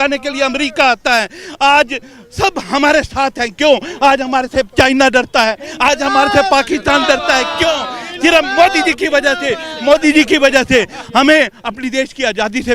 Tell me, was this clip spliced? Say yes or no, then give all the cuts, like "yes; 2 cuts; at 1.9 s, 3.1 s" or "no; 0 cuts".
no; 0 cuts